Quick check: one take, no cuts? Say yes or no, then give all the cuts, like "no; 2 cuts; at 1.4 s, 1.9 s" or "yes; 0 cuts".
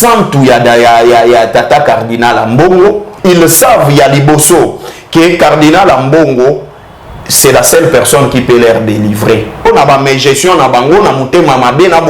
no; 2 cuts; at 3.1 s, 9.7 s